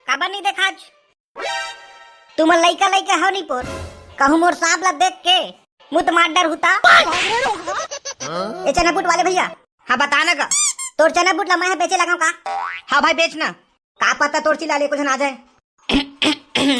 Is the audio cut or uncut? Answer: cut